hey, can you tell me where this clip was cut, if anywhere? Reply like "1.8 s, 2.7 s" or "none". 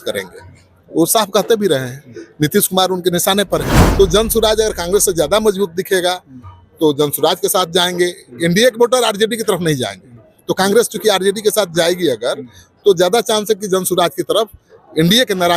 3.8 s